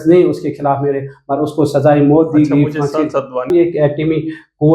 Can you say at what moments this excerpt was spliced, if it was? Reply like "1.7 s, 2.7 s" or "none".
3.5 s